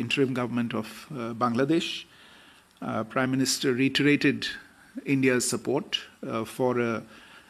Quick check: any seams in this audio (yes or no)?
no